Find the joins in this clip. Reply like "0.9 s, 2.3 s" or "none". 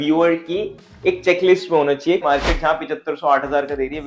2.2 s